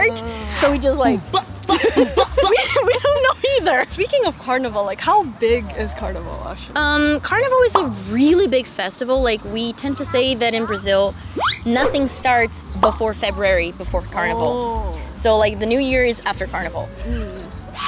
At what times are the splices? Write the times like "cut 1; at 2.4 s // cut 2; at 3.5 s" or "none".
none

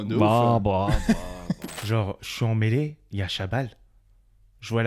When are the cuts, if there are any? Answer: cut 1; at 1.7 s

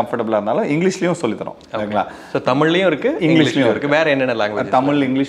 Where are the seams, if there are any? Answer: none

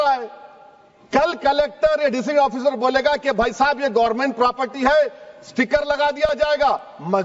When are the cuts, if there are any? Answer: none

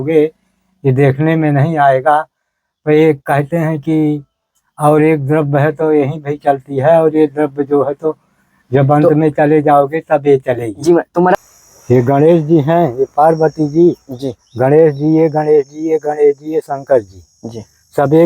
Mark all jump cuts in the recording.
cut 1; at 11.4 s

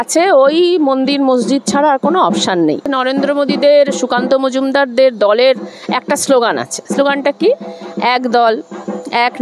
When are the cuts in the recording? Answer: cut 1; at 2.9 s

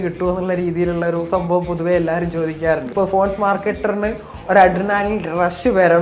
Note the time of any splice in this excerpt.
cut 1; at 2.9 s

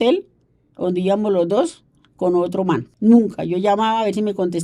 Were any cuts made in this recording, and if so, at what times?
cut 1; at 2.9 s

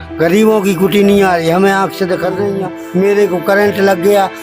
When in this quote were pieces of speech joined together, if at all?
cut 1; at 3.0 s

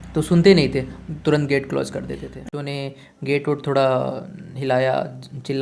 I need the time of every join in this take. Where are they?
cut 1; at 2.5 s

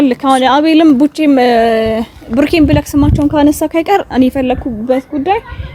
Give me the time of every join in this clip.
none

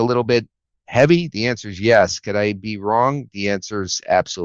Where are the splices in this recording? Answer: none

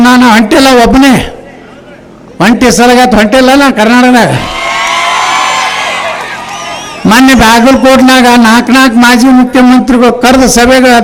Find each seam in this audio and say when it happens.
none

